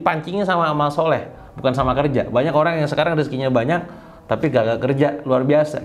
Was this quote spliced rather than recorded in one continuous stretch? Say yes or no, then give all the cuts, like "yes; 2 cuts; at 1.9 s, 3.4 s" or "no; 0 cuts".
no; 0 cuts